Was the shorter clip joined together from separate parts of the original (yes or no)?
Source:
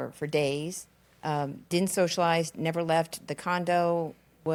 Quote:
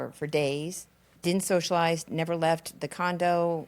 yes